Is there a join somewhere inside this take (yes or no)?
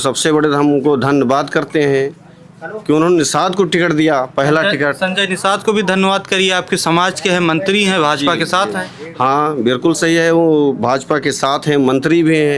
no